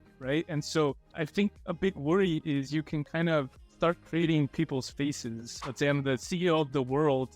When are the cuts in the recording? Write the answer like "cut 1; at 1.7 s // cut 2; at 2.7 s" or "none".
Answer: cut 1; at 1.0 s // cut 2; at 5.6 s